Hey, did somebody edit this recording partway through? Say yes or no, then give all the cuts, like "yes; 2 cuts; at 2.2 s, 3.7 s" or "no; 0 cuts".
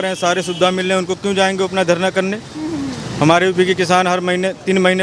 no; 0 cuts